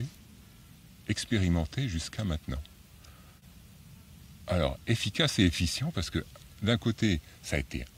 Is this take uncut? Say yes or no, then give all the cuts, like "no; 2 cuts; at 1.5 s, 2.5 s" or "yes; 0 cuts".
yes; 0 cuts